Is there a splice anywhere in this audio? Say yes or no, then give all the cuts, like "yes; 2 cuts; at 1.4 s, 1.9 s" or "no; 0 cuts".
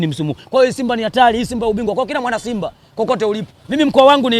no; 0 cuts